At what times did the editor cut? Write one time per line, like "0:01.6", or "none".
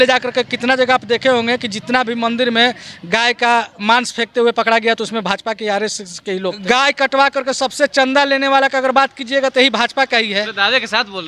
0:06.6